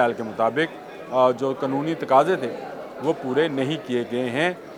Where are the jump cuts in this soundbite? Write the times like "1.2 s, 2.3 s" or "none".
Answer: none